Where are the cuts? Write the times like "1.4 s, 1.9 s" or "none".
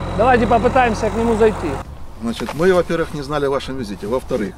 1.9 s